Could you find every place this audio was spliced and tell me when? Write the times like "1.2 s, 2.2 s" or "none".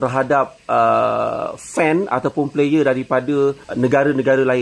3.7 s